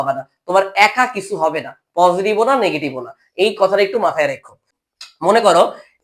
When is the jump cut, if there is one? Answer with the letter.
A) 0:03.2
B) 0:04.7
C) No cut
B